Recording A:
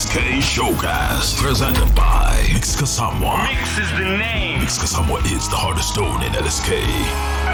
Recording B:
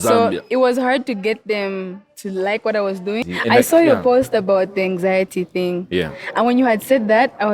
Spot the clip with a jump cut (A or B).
B